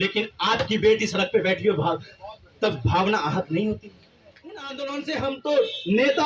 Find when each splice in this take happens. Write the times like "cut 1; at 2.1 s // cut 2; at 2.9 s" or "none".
cut 1; at 4.6 s